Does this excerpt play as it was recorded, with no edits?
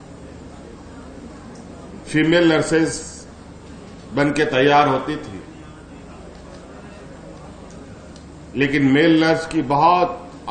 yes; 0 cuts

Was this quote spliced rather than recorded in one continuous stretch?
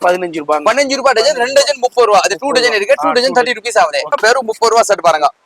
yes; 1 cut; at 4.2 s

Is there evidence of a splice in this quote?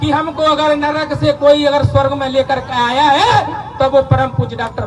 no; 0 cuts

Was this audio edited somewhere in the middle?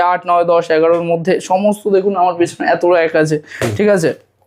no; 0 cuts

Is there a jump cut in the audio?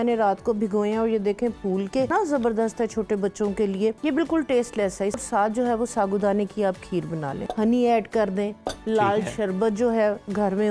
yes; 4 cuts; at 2.1 s, 4.0 s, 5.2 s, 7.4 s

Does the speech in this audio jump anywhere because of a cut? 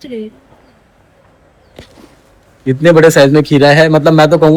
no; 0 cuts

